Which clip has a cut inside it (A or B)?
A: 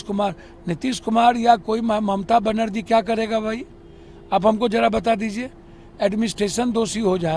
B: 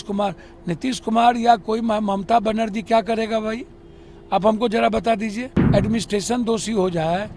B